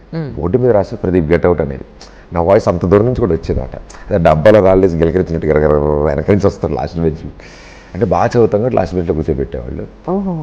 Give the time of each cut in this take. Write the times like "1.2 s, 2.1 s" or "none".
none